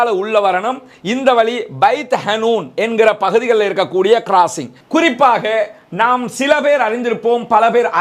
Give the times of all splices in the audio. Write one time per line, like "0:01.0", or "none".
0:04.8

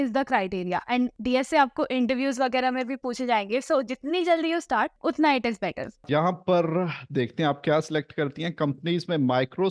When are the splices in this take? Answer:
0:01.2
0:04.9
0:06.0

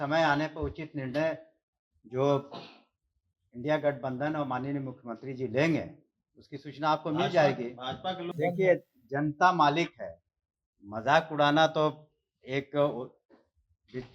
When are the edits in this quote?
0:08.3

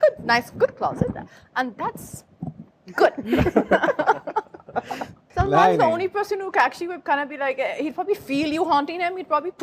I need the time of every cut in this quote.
0:05.2

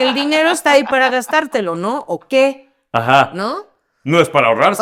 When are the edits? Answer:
none

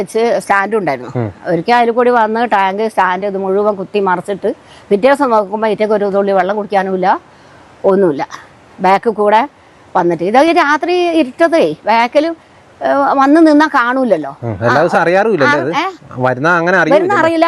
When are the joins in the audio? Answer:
none

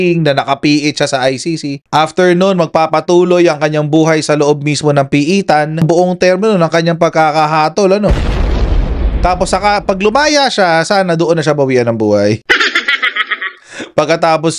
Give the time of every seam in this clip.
0:05.8

